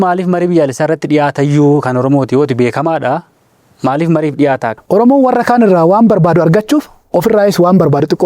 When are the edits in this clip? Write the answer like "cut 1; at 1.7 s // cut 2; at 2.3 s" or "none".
cut 1; at 4.7 s